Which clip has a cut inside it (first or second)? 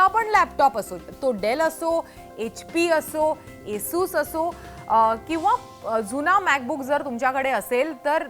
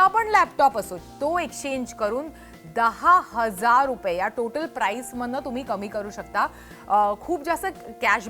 second